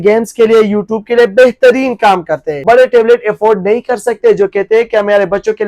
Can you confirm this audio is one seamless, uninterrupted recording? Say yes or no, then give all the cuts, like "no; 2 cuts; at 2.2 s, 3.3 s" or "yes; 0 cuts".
no; 1 cut; at 2.6 s